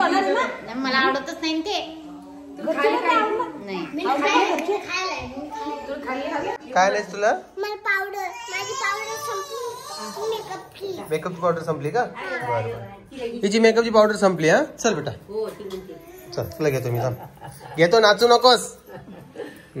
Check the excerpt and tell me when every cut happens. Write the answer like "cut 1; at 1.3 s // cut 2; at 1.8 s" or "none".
cut 1; at 6.6 s